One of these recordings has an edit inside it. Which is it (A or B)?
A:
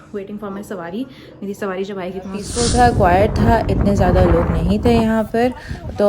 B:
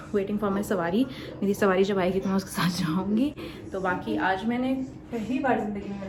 A